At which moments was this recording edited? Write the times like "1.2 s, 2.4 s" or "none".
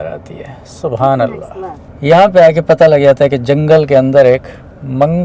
1.7 s